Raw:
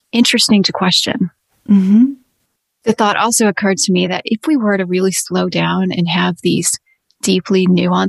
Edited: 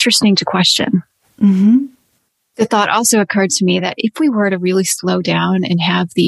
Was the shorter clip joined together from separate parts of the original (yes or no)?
no